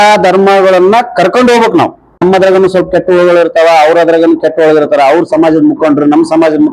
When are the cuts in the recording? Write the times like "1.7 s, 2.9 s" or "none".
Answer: 2.2 s